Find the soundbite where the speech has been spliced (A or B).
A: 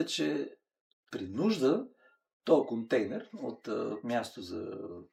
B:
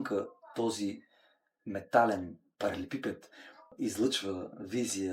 B